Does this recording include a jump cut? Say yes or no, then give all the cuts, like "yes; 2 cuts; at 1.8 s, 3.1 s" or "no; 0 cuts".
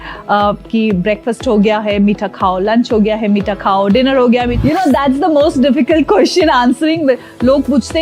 yes; 1 cut; at 4.5 s